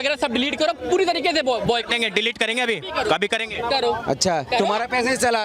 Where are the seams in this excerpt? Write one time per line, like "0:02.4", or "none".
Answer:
none